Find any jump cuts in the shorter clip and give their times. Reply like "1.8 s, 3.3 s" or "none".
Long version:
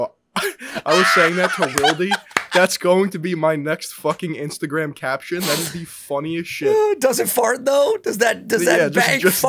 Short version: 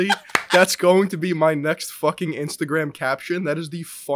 none